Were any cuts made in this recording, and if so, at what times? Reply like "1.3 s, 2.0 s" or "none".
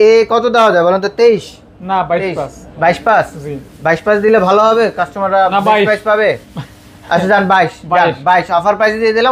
none